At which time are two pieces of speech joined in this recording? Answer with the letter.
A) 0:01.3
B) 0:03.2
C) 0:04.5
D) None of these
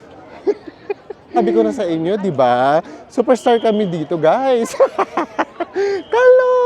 A